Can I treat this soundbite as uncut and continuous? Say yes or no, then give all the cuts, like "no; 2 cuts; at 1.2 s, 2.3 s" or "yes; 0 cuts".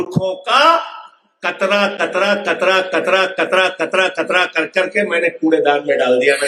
yes; 0 cuts